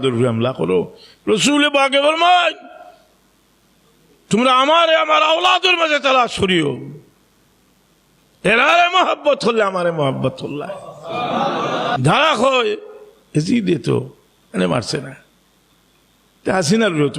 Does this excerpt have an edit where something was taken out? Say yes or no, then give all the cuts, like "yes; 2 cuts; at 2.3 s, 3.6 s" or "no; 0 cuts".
yes; 1 cut; at 12.0 s